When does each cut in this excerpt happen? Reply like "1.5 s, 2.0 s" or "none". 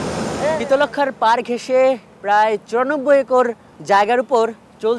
3.7 s